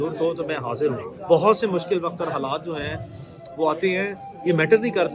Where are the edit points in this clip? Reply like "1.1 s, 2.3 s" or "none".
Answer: 1.1 s